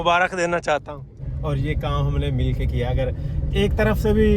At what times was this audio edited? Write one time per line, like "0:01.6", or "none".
0:01.3